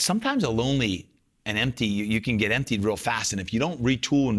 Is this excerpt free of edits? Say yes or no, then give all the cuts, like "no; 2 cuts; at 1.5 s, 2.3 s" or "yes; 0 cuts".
yes; 0 cuts